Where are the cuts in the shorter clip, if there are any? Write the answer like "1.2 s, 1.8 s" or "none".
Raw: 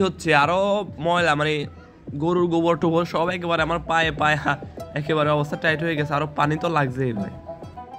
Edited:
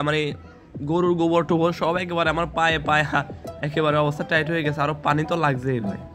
none